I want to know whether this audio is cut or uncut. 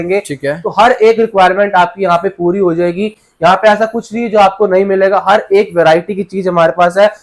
uncut